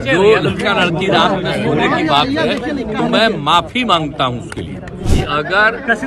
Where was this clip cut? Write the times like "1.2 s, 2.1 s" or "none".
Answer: 5.1 s